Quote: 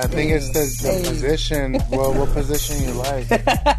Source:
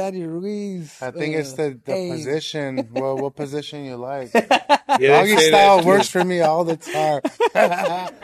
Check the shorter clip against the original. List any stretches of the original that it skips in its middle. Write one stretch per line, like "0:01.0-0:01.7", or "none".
none

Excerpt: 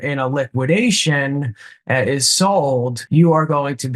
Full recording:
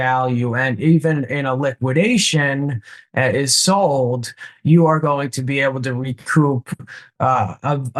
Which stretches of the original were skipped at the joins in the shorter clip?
0:04.2-0:04.5

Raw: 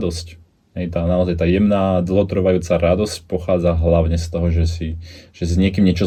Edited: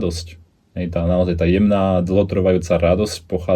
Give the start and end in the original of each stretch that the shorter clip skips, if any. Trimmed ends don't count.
none

